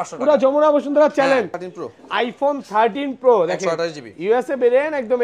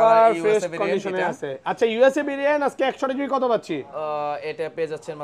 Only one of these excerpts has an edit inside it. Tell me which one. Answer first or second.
first